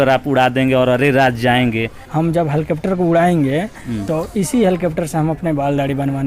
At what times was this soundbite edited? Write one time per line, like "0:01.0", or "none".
0:02.0